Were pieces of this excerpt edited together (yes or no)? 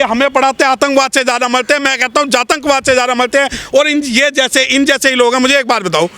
no